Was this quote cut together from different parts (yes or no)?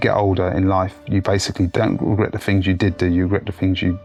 no